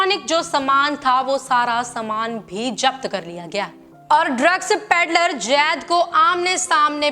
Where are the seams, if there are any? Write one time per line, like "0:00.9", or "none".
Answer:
0:04.0